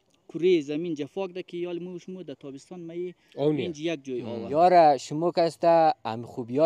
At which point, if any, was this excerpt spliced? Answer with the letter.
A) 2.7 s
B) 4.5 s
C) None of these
B